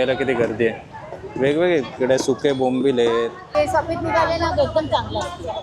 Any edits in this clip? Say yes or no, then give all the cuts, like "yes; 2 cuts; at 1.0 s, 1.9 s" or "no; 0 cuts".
yes; 1 cut; at 3.4 s